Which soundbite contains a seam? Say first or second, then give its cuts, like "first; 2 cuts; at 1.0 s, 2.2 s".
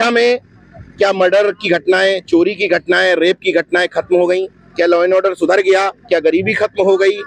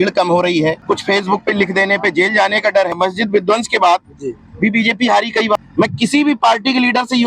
second; 3 cuts; at 0.8 s, 2.9 s, 5.6 s